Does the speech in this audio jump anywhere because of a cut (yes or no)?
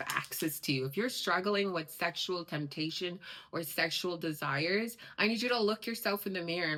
no